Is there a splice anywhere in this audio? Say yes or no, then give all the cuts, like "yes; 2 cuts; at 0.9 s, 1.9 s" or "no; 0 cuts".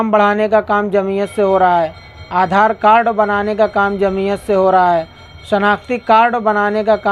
no; 0 cuts